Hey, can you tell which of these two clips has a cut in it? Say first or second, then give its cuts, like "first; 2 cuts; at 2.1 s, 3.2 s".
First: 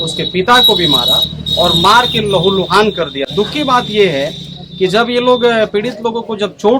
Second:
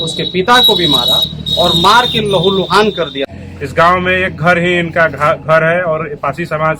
second; 1 cut; at 3.2 s